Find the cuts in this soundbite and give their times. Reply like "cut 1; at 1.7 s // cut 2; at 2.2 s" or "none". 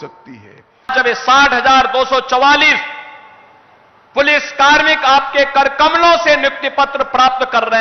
cut 1; at 0.9 s